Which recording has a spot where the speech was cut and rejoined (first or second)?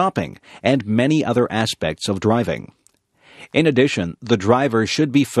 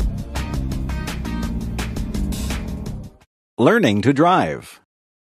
second